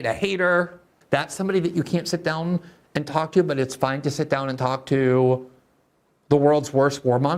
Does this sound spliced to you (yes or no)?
yes